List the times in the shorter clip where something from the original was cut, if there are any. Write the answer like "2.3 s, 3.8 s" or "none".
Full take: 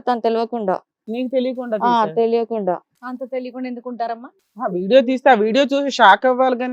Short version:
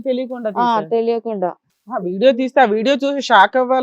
1.7 s